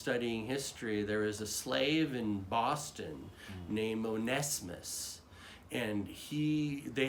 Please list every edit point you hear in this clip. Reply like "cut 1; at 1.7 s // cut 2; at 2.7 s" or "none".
none